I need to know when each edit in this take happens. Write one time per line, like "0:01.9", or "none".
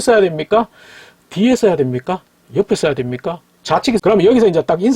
0:04.0

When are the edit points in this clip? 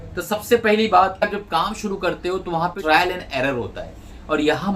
0:01.2
0:02.8

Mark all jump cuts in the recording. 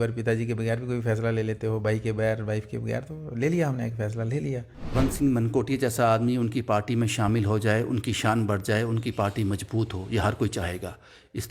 0:04.9

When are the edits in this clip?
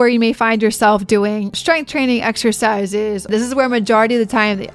0:01.5
0:03.3

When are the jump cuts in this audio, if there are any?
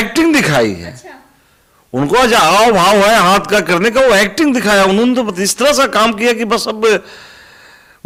none

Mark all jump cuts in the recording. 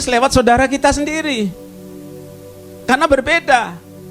none

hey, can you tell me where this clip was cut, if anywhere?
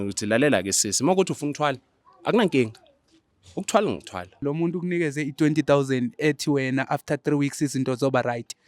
0:04.4

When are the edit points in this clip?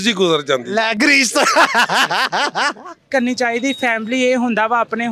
0:03.0

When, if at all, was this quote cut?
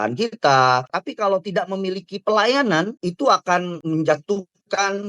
0:01.0
0:03.0
0:03.8

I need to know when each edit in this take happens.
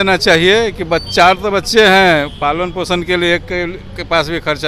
none

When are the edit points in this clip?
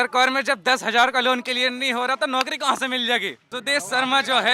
0:03.5

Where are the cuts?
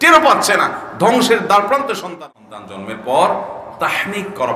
0:02.1

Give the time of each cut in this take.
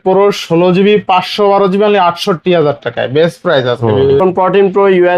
0:04.1

